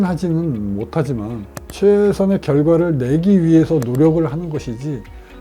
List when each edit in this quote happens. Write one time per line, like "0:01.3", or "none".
0:01.5